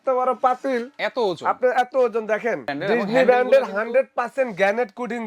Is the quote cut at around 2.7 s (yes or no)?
yes